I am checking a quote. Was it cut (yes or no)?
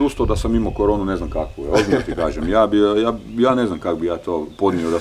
no